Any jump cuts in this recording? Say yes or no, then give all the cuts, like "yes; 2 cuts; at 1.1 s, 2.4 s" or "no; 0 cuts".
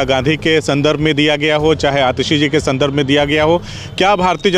no; 0 cuts